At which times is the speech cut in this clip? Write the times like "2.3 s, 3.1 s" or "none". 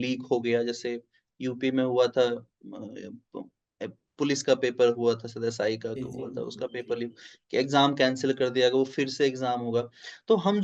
none